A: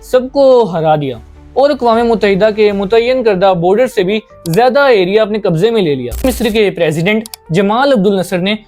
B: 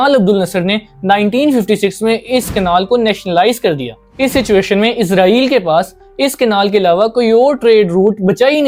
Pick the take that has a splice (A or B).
A